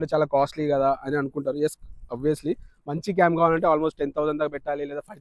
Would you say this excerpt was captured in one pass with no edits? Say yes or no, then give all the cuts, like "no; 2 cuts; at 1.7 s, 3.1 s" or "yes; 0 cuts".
yes; 0 cuts